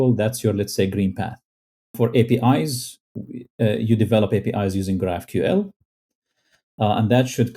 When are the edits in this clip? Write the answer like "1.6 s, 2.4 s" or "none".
1.9 s